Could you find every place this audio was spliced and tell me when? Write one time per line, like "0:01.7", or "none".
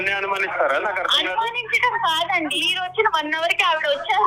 0:02.6